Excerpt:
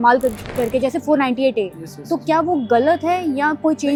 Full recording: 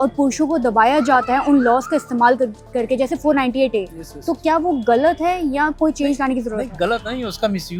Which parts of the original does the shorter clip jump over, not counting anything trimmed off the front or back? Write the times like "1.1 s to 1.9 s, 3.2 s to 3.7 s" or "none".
none